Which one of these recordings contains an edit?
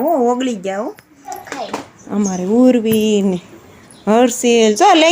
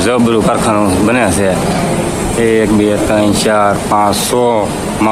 first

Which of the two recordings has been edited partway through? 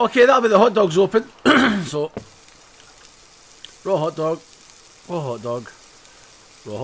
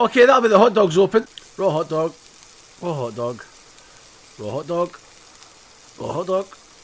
second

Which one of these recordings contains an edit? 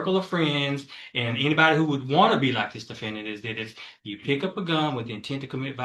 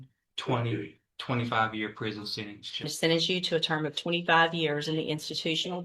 second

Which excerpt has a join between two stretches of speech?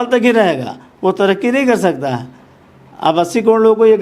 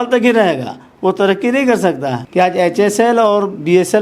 second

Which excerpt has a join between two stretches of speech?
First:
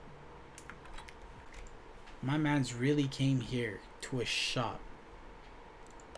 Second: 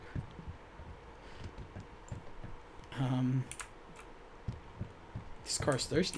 first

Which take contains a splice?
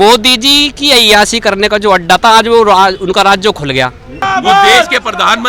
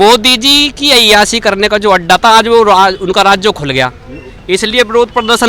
first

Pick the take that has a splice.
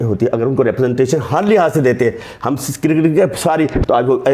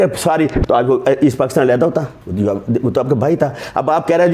second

